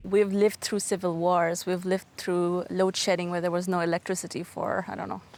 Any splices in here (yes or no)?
no